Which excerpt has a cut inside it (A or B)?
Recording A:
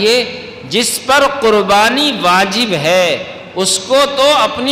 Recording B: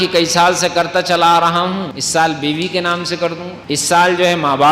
B